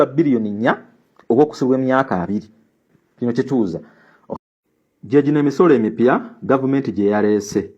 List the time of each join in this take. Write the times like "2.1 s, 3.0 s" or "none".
4.2 s